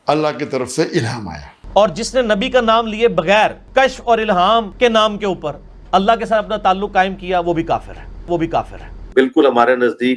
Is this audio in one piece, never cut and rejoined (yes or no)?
no